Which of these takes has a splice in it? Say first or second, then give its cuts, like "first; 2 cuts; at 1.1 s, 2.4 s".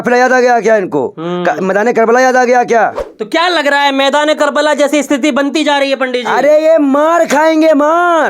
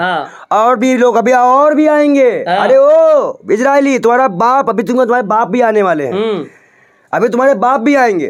first; 1 cut; at 3.1 s